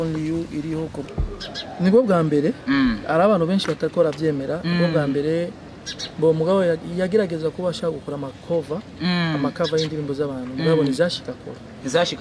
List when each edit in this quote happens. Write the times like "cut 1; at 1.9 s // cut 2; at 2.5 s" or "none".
cut 1; at 1.1 s